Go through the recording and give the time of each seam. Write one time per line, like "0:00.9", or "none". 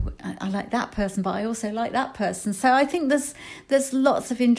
none